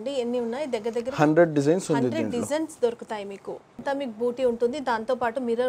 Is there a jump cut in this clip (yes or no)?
yes